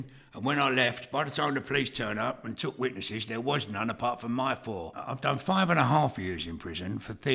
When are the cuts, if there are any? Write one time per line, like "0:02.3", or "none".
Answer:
0:04.9